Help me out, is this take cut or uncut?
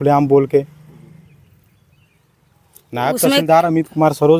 uncut